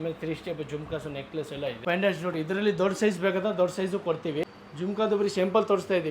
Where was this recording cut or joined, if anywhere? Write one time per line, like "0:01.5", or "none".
0:01.8
0:04.4